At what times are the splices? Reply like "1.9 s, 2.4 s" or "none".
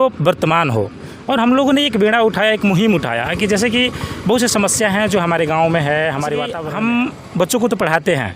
6.6 s